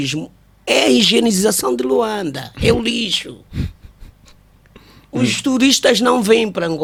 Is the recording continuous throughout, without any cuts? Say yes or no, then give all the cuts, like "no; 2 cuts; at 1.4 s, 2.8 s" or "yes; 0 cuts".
yes; 0 cuts